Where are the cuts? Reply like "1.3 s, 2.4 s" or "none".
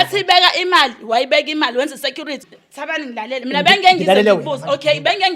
2.5 s